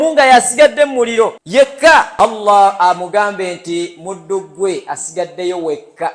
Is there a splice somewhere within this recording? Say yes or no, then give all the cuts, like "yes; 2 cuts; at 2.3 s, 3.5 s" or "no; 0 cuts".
yes; 2 cuts; at 0.9 s, 2.1 s